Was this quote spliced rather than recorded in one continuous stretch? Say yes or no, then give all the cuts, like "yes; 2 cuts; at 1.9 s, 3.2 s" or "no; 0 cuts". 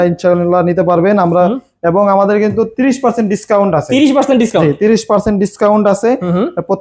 no; 0 cuts